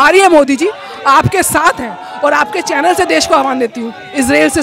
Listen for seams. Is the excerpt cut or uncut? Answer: uncut